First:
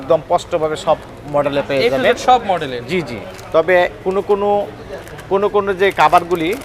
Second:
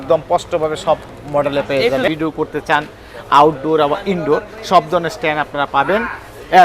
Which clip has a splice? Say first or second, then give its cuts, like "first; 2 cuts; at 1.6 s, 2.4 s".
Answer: second; 1 cut; at 2.1 s